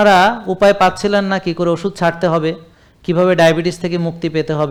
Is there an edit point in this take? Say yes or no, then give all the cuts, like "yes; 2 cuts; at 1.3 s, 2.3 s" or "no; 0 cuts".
no; 0 cuts